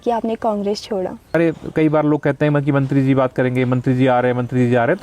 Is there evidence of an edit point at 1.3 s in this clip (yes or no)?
yes